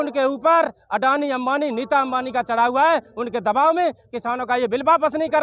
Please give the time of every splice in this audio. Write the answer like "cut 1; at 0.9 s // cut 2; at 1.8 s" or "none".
none